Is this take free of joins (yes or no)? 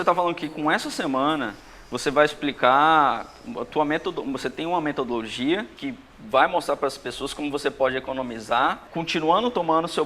no